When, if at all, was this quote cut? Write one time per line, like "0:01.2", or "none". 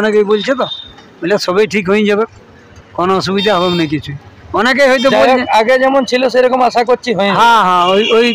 none